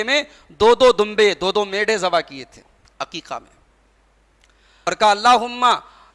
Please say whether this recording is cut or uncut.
cut